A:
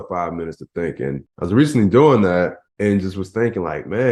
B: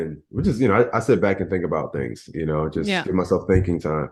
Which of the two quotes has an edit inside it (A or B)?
A